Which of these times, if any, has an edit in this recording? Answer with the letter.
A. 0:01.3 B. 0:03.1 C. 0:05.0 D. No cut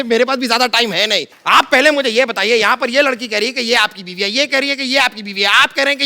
A